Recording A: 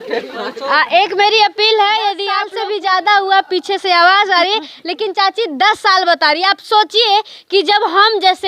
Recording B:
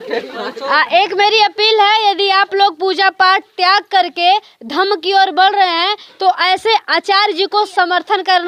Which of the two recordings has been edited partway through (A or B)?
A